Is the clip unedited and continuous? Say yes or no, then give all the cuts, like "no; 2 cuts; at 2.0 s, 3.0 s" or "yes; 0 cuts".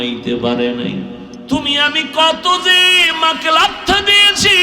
no; 1 cut; at 1.3 s